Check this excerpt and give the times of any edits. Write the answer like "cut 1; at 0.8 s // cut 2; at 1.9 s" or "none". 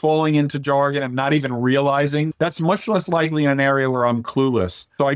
cut 1; at 2.3 s